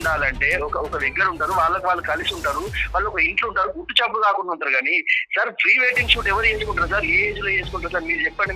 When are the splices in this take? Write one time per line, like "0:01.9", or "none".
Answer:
none

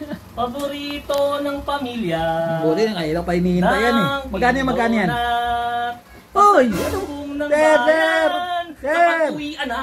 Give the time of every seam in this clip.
none

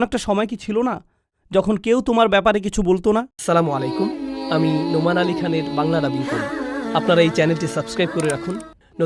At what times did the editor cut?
0:03.3

